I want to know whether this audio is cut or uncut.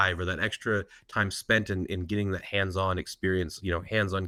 uncut